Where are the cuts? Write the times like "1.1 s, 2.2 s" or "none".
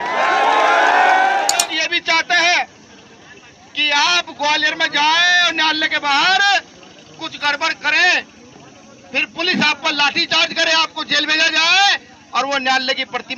1.6 s